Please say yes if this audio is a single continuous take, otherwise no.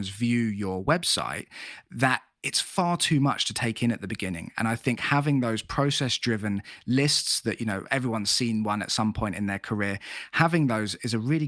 yes